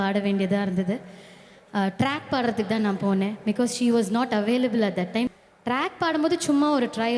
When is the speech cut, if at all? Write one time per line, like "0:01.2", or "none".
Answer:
0:05.3